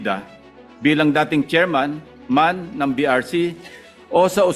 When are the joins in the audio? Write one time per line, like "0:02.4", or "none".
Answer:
none